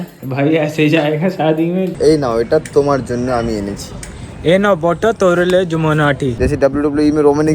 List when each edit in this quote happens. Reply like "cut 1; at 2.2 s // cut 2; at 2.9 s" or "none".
cut 1; at 1.9 s // cut 2; at 6.3 s